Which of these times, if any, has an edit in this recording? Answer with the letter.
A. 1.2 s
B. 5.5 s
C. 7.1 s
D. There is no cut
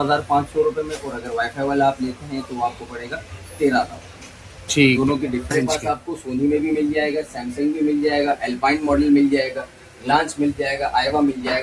B